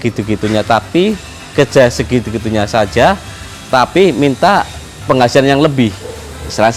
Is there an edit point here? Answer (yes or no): no